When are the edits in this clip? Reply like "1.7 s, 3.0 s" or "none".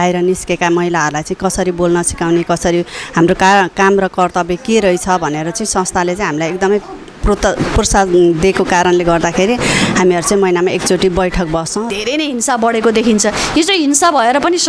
11.9 s